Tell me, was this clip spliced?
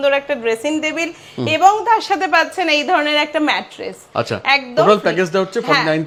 no; 0 cuts

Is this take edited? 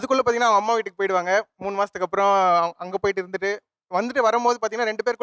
no; 0 cuts

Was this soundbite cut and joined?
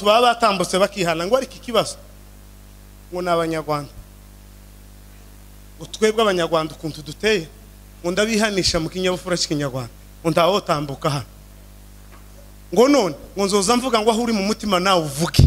no; 0 cuts

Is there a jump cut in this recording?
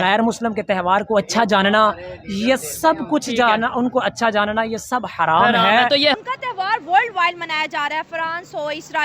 yes; 1 cut; at 6.1 s

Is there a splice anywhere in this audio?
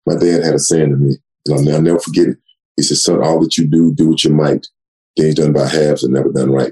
no; 0 cuts

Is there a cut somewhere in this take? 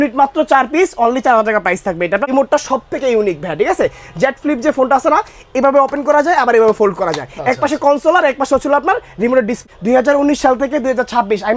yes; 2 cuts; at 2.3 s, 9.5 s

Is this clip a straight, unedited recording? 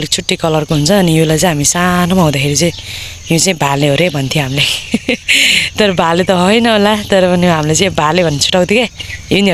yes; 0 cuts

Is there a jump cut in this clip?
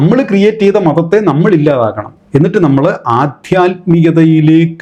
no; 0 cuts

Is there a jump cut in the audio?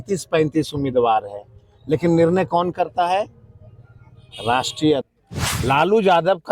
yes; 1 cut; at 5.1 s

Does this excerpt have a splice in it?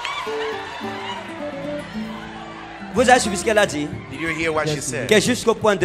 no; 0 cuts

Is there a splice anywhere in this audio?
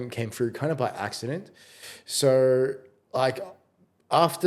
no; 0 cuts

